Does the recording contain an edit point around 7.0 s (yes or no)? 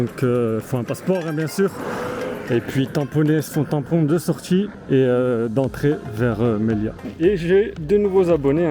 yes